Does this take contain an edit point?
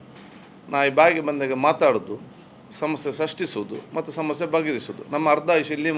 no; 0 cuts

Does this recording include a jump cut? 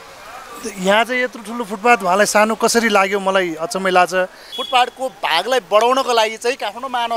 yes; 1 cut; at 4.5 s

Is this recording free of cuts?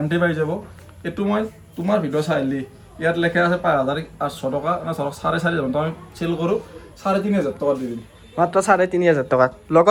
yes; 0 cuts

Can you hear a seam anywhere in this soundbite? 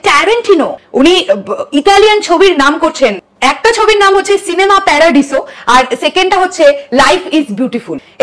no; 0 cuts

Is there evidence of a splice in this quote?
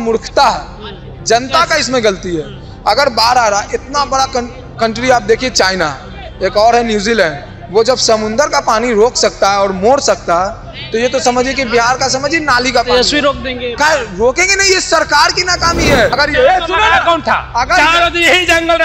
yes; 1 cut; at 16.1 s

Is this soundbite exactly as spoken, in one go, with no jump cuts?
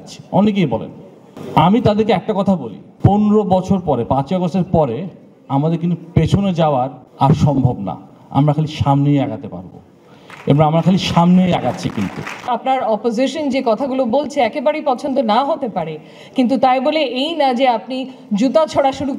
no; 1 cut; at 12.5 s

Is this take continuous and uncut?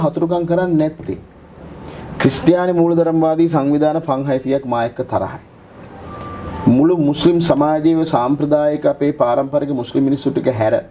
yes; 0 cuts

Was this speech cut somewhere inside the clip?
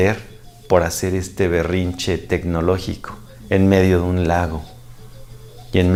no; 0 cuts

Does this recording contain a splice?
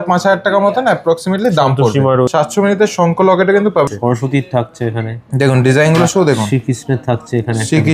yes; 2 cuts; at 2.3 s, 3.9 s

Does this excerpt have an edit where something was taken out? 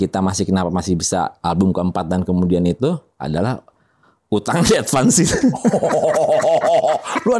no; 0 cuts

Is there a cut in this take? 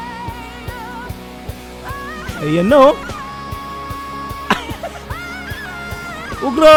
no; 0 cuts

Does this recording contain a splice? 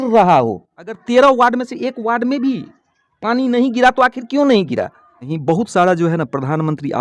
yes; 2 cuts; at 1.0 s, 5.3 s

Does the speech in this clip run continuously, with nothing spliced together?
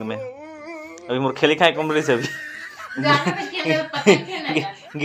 yes; 0 cuts

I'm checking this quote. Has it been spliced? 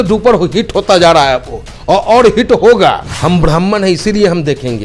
yes; 1 cut; at 3.1 s

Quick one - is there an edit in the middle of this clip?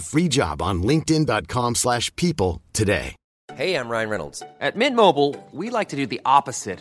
yes; 1 cut; at 3.2 s

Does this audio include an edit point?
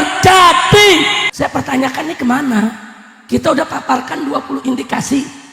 yes; 1 cut; at 1.2 s

